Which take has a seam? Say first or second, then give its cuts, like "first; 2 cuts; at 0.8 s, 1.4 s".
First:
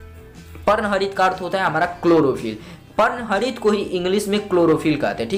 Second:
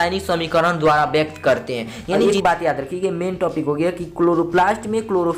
second; 1 cut; at 2.1 s